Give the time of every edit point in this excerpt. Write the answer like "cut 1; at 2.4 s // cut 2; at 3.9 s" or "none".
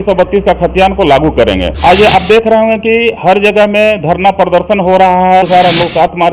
cut 1; at 1.7 s // cut 2; at 5.4 s